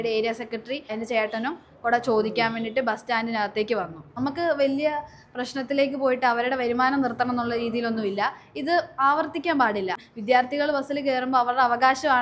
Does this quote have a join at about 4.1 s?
yes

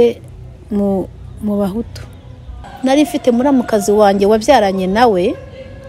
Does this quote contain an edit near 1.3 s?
no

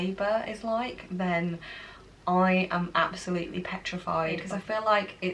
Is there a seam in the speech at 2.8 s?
no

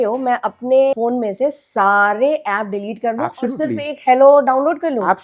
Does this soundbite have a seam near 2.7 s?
no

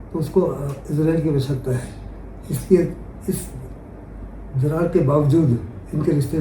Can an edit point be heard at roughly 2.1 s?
no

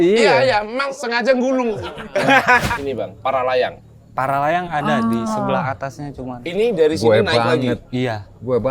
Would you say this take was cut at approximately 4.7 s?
no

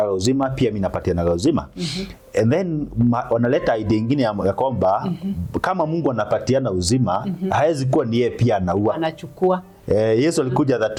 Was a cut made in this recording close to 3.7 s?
no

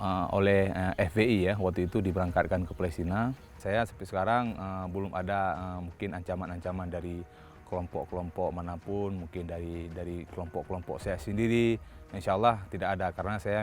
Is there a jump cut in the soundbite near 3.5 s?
yes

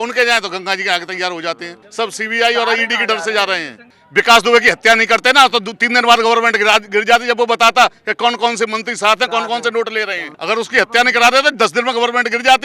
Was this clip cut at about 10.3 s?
yes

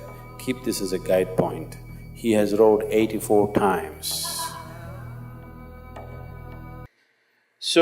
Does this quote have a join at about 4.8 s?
no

